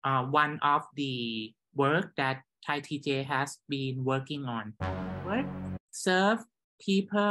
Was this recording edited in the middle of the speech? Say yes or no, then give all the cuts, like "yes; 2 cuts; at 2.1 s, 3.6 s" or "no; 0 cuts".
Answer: yes; 1 cut; at 5.3 s